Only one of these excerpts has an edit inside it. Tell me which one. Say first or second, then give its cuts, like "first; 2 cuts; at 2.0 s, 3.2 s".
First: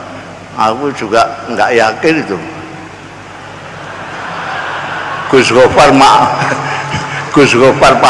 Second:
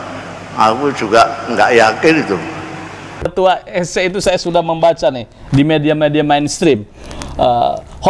second; 1 cut; at 3.3 s